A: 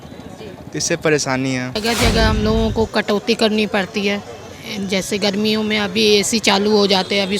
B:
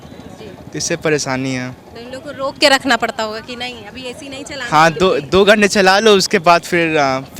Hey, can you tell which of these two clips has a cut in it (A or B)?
A